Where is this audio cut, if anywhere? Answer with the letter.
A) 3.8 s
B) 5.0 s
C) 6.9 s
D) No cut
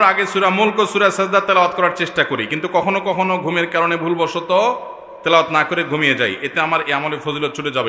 D